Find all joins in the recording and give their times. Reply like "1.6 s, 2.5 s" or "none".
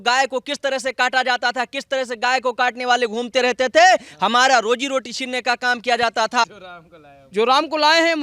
6.4 s